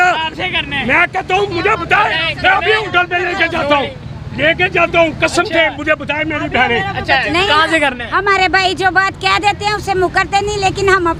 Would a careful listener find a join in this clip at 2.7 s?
no; 0 cuts

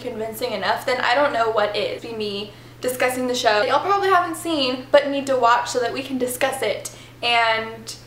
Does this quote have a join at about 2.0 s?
yes; 1 cut; at 2.0 s

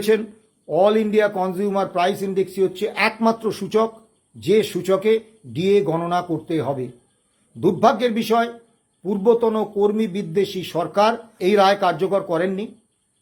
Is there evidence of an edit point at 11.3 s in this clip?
yes; 1 cut; at 11.3 s

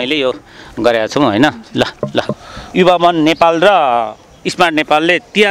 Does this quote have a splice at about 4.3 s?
no; 1 cut; at 2.4 s

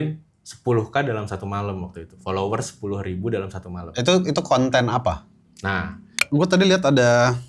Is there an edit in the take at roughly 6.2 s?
yes; 1 cut; at 6.2 s

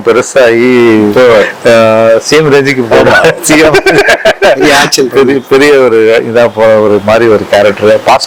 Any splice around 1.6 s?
no; 0 cuts

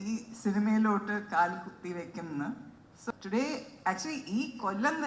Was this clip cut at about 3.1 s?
yes; 1 cut; at 3.1 s

